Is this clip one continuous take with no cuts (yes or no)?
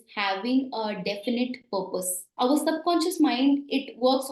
no